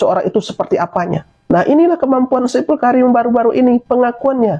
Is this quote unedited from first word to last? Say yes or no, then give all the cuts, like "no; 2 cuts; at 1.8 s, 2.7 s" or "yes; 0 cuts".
no; 1 cut; at 1.3 s